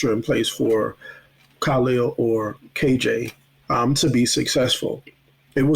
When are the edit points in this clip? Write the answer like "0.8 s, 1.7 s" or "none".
none